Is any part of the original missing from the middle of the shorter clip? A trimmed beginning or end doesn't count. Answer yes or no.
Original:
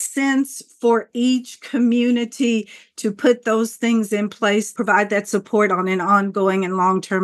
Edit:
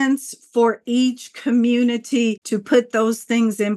yes